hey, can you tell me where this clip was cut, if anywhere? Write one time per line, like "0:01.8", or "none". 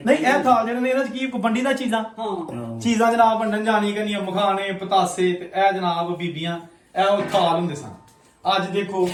none